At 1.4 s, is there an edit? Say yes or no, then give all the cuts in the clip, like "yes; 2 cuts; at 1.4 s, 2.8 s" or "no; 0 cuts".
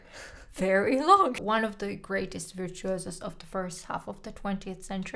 yes; 1 cut; at 1.4 s